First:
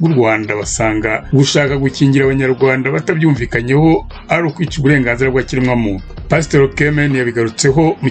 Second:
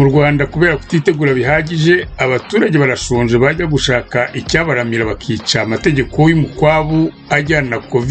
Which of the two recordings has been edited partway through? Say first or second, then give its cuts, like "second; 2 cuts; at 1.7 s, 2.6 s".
first; 1 cut; at 1.2 s